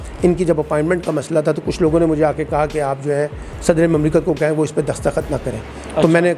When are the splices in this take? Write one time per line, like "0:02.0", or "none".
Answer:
none